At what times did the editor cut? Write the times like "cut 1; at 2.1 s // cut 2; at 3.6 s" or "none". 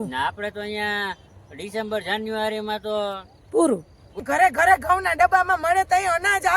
cut 1; at 4.2 s